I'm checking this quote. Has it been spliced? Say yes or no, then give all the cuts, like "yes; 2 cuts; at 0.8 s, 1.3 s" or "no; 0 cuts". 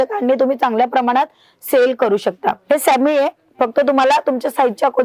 yes; 1 cut; at 2.6 s